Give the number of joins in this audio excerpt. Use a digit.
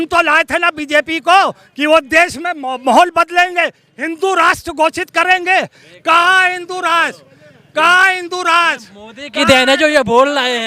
0